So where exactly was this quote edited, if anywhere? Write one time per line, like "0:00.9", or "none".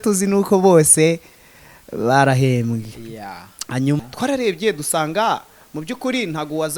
0:04.0